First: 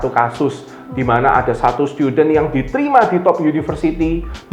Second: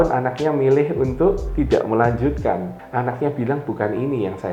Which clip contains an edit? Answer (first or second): second